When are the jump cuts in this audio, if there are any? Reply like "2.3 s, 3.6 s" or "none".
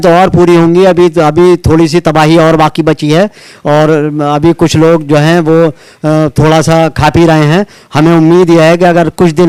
none